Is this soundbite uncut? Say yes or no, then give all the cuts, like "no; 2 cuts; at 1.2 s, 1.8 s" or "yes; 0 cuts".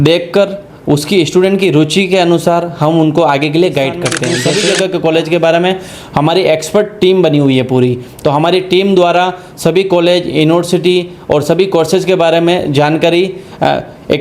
no; 1 cut; at 4.4 s